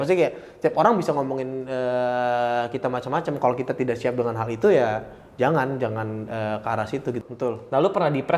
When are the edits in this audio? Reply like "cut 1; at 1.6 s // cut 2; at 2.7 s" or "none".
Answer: cut 1; at 7.2 s